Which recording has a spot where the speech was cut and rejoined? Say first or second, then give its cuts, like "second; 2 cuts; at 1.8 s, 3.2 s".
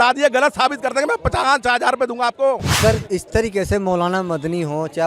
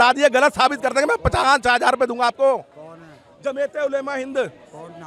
first; 1 cut; at 2.8 s